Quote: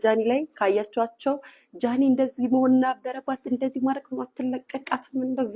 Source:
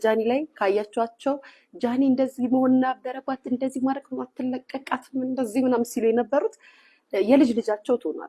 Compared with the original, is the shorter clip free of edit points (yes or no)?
yes